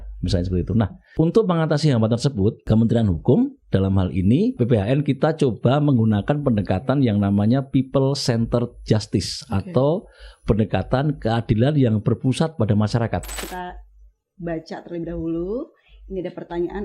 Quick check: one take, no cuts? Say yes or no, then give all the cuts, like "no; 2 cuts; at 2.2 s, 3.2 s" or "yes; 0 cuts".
no; 4 cuts; at 1.0 s, 2.6 s, 4.6 s, 13.4 s